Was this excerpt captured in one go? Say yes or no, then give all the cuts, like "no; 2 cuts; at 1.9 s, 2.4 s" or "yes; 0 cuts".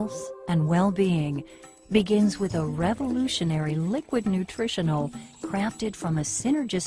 yes; 0 cuts